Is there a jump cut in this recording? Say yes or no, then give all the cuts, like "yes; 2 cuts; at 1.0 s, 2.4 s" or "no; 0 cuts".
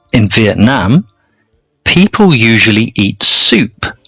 no; 0 cuts